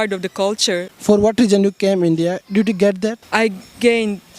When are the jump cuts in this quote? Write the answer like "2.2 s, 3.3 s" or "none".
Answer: 0.9 s, 3.2 s